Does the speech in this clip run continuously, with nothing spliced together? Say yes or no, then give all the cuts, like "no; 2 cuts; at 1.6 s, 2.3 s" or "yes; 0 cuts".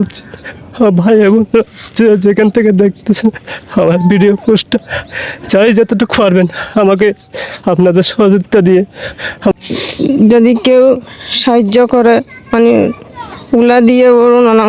no; 1 cut; at 9.5 s